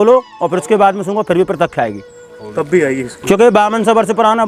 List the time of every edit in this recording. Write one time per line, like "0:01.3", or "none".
none